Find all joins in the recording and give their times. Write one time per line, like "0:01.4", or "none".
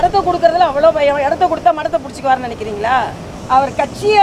0:03.3